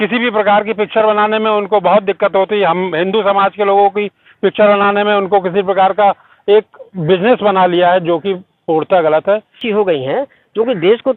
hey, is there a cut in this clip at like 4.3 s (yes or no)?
no